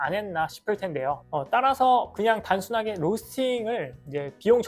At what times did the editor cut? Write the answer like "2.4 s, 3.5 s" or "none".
1.2 s

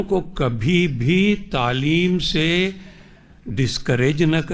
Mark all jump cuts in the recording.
none

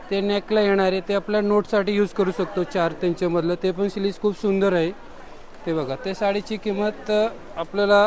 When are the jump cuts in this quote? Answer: none

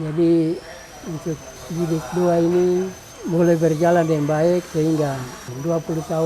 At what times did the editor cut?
1.5 s

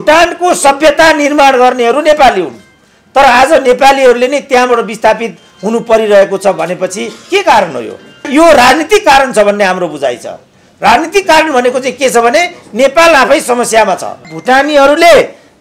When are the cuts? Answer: 8.3 s, 14.3 s

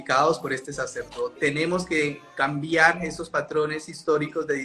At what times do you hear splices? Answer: 1.3 s

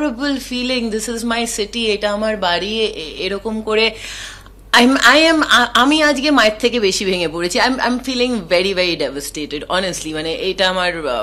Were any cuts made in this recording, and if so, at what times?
none

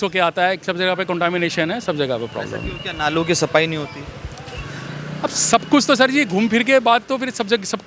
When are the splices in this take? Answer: none

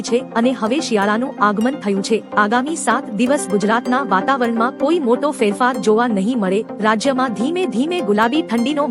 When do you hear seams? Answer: none

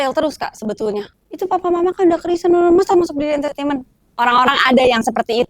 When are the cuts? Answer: 1.1 s

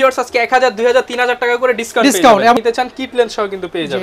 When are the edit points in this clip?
2.6 s

